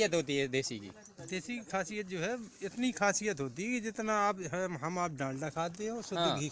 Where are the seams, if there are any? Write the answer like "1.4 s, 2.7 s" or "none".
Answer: none